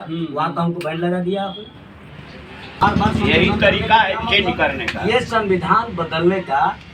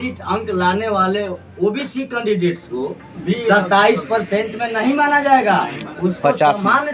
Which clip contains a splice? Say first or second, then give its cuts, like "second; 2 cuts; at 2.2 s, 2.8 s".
first; 1 cut; at 2.8 s